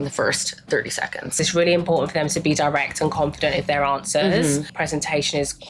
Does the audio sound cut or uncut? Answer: cut